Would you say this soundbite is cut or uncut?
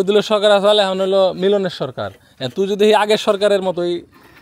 uncut